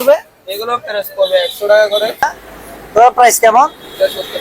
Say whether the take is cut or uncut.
cut